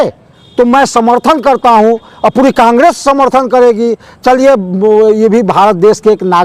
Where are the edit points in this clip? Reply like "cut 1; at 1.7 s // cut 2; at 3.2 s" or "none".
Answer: none